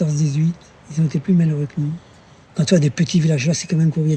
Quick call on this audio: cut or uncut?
cut